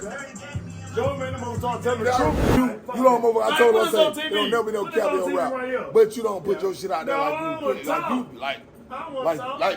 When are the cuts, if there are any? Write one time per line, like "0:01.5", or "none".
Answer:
0:02.3